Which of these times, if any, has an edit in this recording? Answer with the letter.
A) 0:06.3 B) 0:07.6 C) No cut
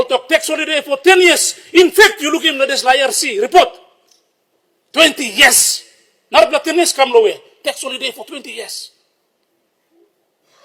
C